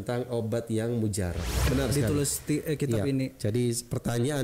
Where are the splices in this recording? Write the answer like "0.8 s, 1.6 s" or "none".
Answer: 1.7 s